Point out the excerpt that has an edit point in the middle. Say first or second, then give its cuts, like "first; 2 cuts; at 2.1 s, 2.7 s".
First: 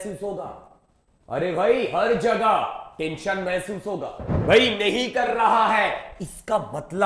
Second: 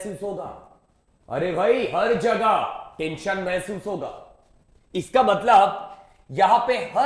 first; 1 cut; at 4.3 s